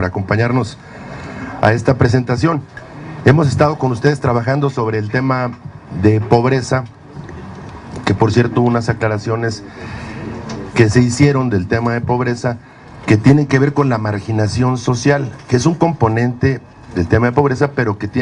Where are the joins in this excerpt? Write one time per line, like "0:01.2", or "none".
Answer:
none